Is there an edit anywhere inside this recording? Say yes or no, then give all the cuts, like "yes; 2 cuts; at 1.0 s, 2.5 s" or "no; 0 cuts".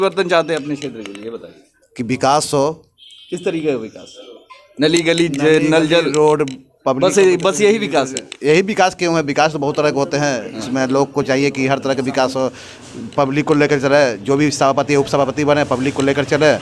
no; 0 cuts